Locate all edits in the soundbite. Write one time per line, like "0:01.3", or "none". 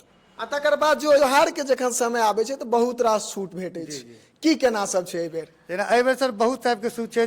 0:01.2